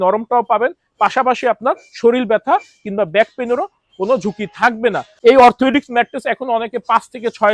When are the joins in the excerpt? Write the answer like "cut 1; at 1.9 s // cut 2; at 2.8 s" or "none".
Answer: cut 1; at 5.1 s